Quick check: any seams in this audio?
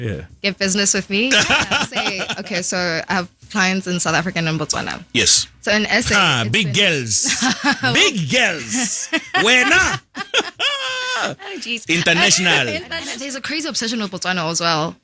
yes; 2 cuts; at 2.3 s, 13.1 s

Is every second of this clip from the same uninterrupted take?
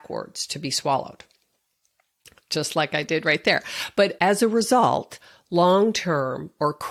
yes; 0 cuts

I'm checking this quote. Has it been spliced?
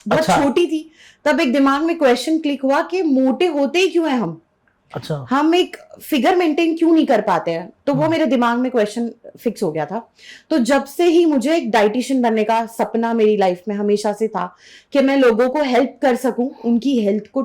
no; 0 cuts

